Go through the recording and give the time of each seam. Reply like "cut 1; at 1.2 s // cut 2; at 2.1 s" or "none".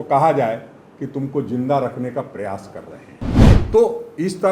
cut 1; at 3.3 s

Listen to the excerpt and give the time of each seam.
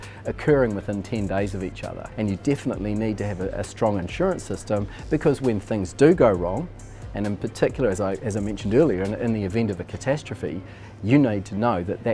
cut 1; at 2.0 s

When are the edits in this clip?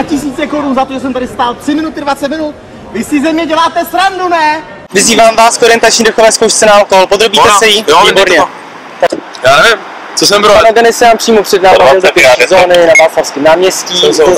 cut 1; at 4.8 s // cut 2; at 9.1 s

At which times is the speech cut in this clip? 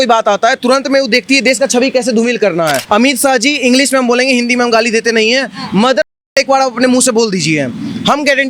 cut 1; at 2.8 s

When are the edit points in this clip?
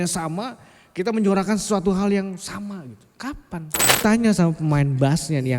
cut 1; at 4.0 s

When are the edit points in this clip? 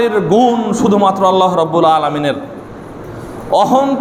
none

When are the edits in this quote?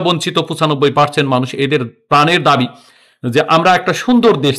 none

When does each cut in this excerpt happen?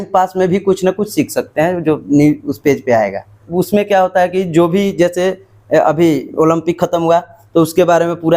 cut 1; at 3.5 s

